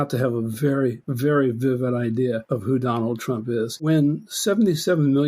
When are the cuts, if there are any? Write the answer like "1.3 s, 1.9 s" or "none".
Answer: 1.1 s, 2.4 s, 3.8 s